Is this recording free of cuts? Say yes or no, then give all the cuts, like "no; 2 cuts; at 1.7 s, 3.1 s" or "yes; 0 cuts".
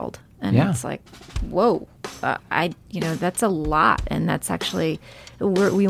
no; 1 cut; at 2.4 s